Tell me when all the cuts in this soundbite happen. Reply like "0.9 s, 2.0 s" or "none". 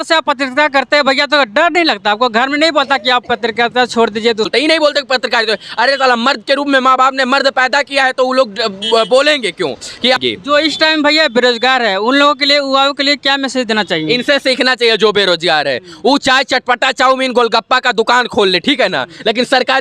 4.5 s, 10.2 s